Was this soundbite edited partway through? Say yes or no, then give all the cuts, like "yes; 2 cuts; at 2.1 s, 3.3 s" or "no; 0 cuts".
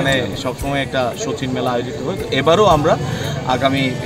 no; 0 cuts